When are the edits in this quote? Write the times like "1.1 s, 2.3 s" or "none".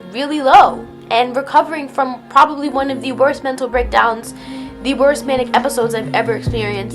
none